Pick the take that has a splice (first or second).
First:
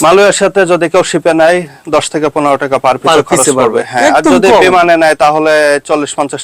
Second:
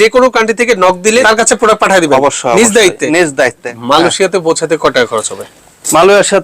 second